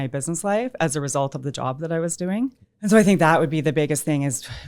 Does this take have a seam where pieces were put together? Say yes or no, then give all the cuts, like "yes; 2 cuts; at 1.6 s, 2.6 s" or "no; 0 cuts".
yes; 1 cut; at 2.7 s